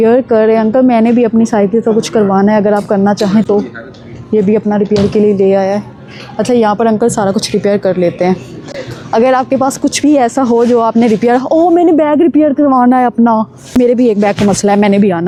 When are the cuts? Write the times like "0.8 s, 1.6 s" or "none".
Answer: none